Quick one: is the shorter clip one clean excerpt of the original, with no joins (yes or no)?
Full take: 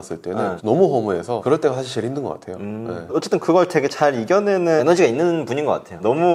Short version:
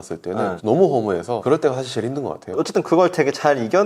no